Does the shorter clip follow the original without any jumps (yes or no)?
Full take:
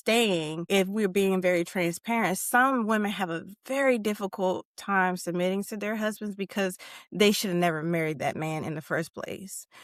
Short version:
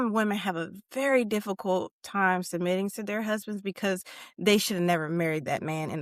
yes